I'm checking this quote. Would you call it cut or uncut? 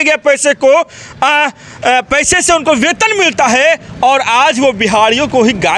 uncut